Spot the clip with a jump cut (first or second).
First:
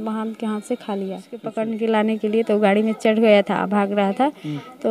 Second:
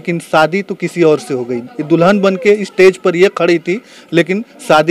first